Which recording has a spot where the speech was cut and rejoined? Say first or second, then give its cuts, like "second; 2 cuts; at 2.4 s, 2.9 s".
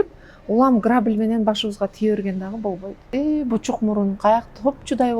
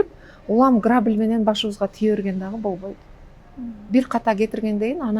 first; 1 cut; at 3.0 s